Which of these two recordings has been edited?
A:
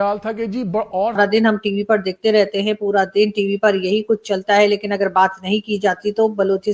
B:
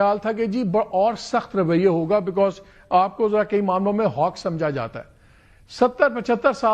A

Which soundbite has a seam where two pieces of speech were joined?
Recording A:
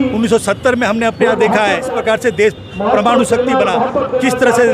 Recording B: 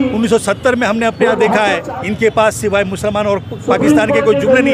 B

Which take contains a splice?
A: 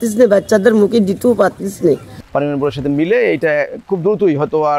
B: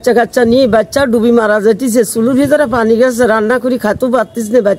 A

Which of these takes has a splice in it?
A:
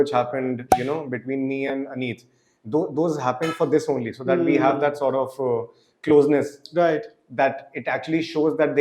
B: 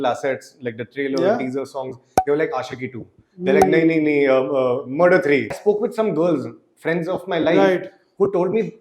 B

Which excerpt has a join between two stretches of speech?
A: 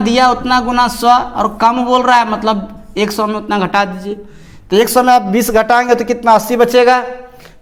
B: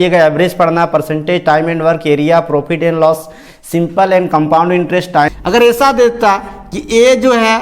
B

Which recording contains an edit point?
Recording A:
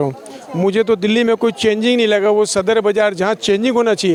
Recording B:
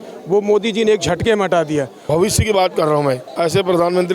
B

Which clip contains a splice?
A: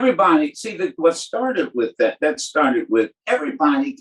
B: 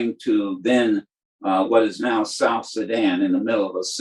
A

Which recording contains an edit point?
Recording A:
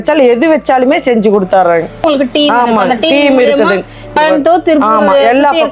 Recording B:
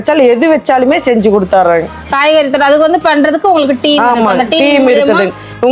A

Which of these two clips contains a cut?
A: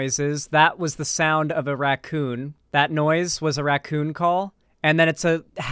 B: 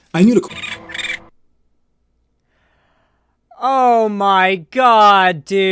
A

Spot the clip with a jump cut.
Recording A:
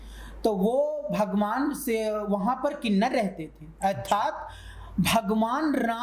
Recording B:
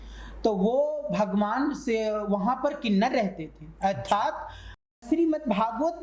B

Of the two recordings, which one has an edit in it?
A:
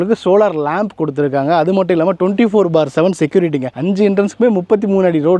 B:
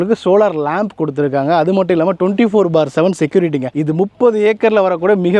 A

